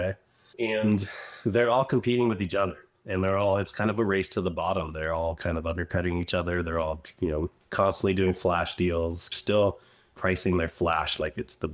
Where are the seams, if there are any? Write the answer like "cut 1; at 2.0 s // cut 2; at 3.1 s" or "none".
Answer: cut 1; at 9.3 s